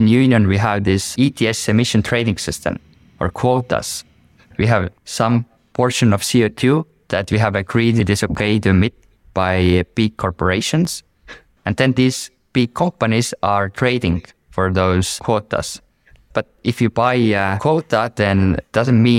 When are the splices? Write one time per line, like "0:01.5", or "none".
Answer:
0:01.1
0:04.6
0:08.0
0:11.4
0:17.6